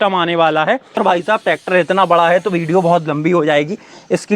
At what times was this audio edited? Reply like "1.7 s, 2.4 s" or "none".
1.0 s